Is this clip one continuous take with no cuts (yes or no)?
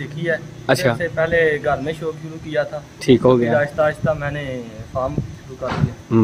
yes